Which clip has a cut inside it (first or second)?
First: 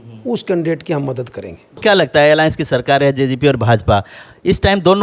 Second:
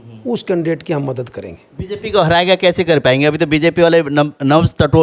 first